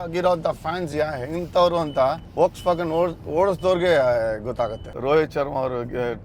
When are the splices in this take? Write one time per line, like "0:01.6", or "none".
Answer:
0:02.2
0:04.9